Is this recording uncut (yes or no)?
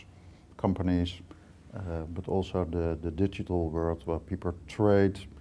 no